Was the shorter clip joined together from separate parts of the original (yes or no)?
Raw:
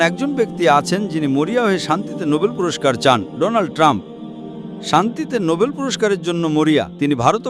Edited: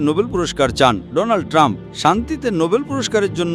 yes